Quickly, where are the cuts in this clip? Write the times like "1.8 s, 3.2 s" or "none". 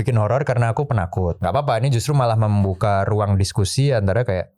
1.4 s